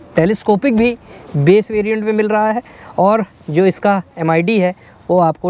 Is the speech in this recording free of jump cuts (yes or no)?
yes